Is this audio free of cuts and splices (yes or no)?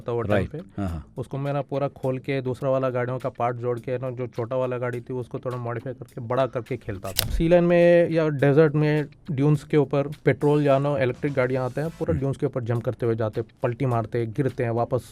no